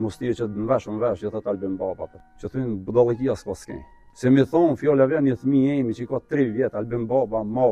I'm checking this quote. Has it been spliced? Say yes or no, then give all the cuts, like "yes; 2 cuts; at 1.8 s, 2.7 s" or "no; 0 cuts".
no; 0 cuts